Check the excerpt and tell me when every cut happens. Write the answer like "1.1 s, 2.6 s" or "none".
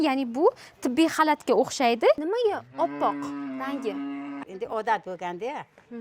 2.2 s, 4.4 s

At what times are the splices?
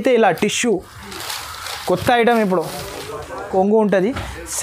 3.5 s

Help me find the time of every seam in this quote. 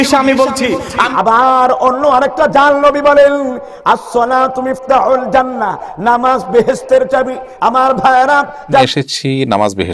1.0 s, 8.8 s

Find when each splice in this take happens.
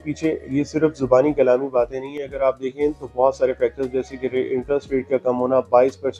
none

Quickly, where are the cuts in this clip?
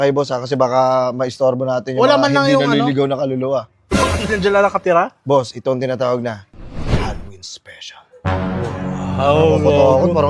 none

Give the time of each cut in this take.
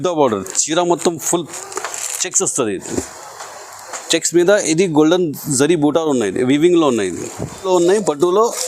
7.6 s

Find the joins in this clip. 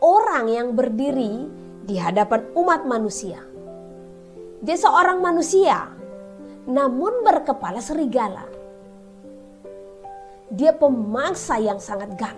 none

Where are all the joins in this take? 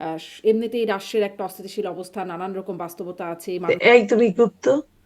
3.5 s

